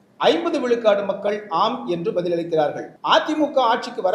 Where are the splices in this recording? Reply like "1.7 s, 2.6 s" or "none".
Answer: 2.9 s